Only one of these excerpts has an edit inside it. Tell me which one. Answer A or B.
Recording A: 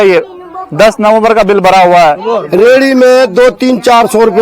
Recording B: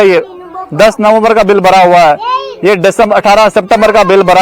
A